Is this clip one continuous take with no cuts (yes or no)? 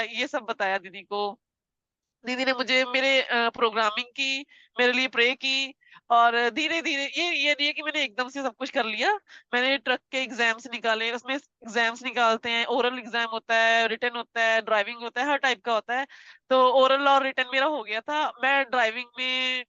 yes